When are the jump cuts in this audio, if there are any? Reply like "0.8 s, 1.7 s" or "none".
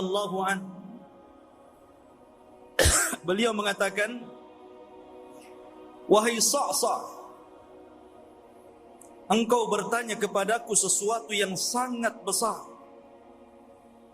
1.3 s, 2.7 s, 4.6 s, 6.1 s, 7.3 s, 9.3 s